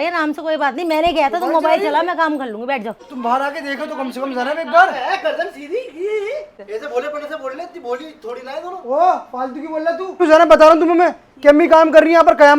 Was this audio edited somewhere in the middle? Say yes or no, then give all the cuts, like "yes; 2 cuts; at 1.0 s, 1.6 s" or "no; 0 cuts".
yes; 3 cuts; at 3.0 s, 6.6 s, 10.2 s